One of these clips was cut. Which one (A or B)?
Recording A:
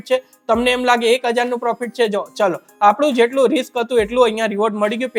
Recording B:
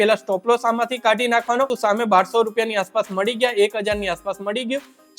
B